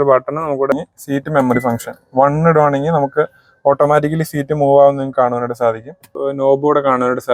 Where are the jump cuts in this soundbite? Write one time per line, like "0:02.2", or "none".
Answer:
0:00.7
0:06.1